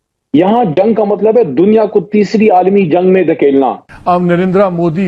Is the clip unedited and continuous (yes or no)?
no